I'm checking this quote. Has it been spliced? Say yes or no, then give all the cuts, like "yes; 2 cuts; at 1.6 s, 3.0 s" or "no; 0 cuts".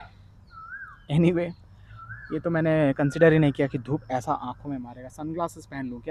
no; 0 cuts